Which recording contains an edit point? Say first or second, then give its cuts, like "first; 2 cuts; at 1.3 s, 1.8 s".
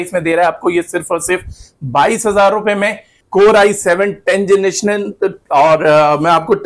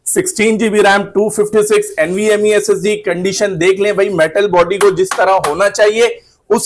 first; 1 cut; at 3.1 s